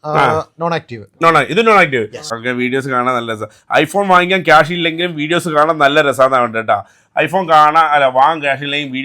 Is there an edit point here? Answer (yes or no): yes